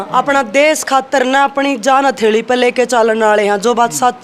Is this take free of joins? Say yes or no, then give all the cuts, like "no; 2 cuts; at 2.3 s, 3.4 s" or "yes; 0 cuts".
yes; 0 cuts